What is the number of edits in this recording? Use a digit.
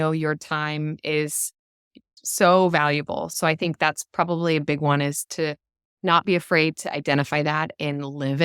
2